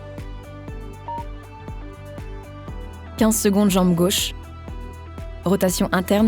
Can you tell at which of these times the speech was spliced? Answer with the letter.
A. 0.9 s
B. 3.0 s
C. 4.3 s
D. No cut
B